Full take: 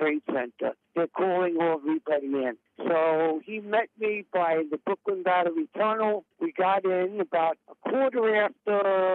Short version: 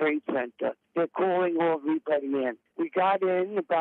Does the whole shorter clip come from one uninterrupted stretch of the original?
no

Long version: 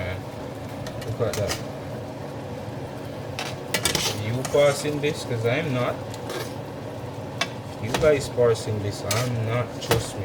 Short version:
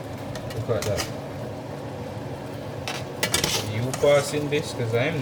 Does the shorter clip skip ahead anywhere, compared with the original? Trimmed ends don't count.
no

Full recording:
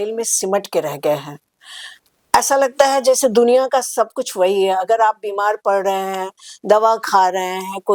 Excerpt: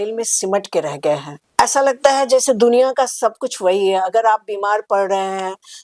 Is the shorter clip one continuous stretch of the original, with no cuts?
no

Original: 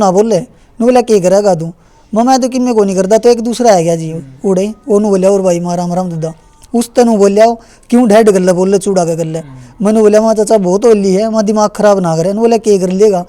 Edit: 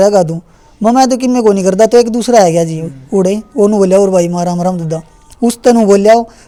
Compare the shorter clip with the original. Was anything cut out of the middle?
no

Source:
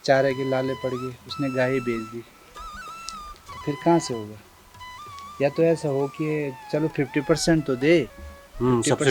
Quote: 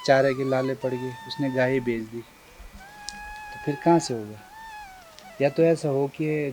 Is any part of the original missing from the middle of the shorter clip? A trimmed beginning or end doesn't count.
no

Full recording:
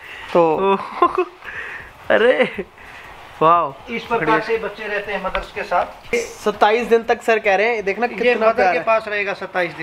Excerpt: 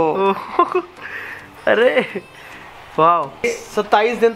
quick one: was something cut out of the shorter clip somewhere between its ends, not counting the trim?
yes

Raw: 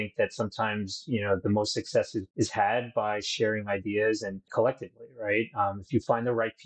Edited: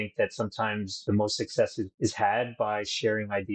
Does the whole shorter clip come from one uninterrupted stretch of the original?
no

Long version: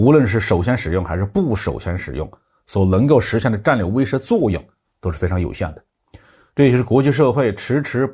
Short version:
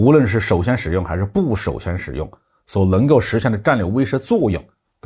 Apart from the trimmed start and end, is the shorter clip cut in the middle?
no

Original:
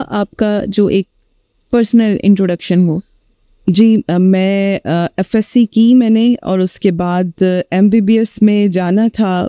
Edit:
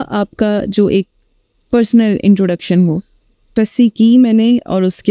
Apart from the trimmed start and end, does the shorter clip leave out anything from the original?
yes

